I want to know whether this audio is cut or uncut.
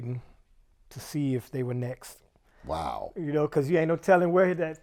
uncut